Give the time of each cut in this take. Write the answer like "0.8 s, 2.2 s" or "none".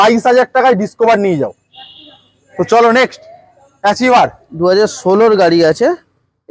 none